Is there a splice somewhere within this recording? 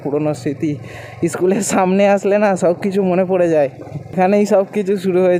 no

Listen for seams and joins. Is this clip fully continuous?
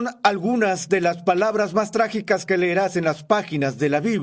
yes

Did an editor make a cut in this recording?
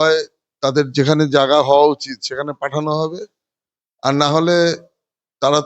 no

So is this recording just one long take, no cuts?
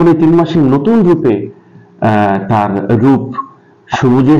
yes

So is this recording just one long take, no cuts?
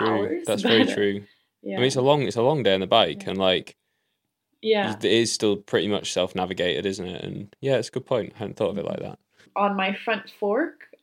no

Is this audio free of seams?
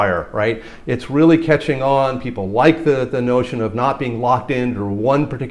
yes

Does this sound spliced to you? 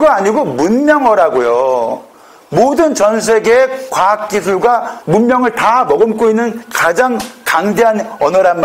no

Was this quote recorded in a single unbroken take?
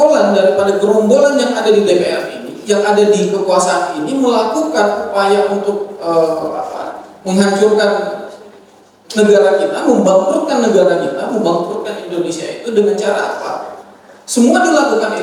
yes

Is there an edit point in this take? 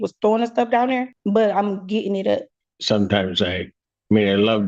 yes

